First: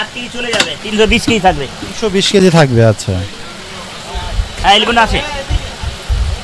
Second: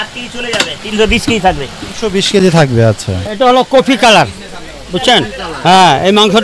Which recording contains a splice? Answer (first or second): second